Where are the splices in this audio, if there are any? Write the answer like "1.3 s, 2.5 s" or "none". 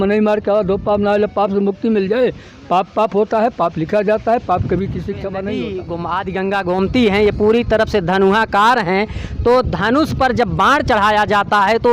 5.8 s

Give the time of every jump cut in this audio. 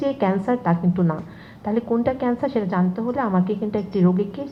none

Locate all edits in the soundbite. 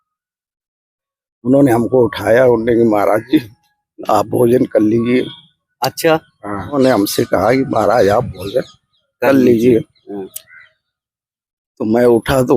6.7 s

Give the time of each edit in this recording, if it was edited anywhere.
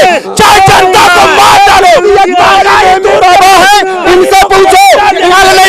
none

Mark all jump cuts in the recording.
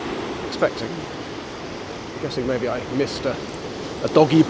none

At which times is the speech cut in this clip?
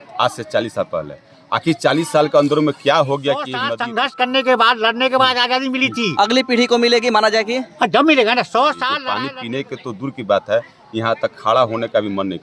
3.6 s, 9.0 s

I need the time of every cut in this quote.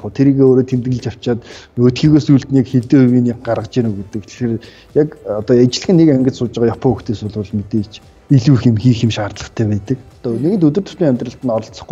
10.1 s

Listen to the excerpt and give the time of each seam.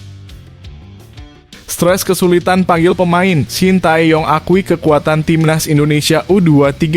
1.7 s

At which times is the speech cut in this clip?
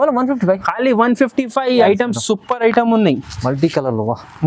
1.8 s

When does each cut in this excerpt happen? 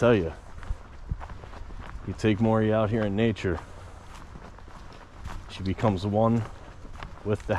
none

